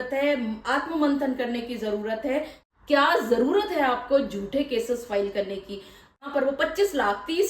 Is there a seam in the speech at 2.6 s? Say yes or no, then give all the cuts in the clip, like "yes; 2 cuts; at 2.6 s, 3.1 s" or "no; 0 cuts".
yes; 2 cuts; at 2.6 s, 6.2 s